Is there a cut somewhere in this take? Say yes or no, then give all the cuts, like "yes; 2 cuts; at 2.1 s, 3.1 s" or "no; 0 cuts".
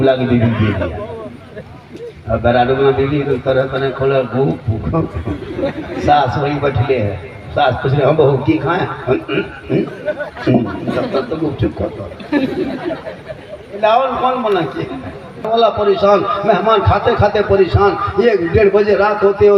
yes; 1 cut; at 15.5 s